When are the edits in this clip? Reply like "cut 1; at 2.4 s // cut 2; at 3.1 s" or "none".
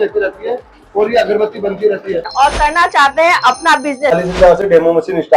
cut 1; at 2.3 s // cut 2; at 4.1 s